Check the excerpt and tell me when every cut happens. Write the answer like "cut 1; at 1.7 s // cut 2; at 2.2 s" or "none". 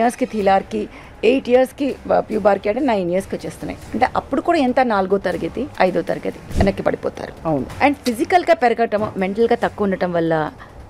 cut 1; at 5.7 s // cut 2; at 6.4 s // cut 3; at 7.7 s